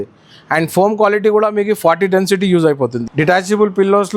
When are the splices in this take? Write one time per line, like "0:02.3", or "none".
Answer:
0:03.0